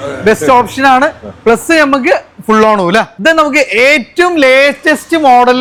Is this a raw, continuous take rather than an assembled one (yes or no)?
yes